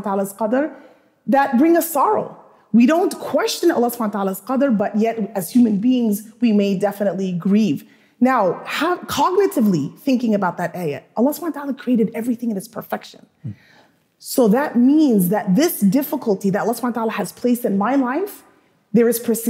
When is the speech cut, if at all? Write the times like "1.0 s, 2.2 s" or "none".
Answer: none